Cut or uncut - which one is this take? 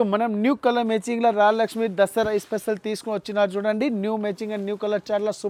uncut